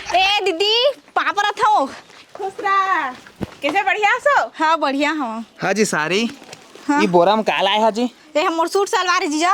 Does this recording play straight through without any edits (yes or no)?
yes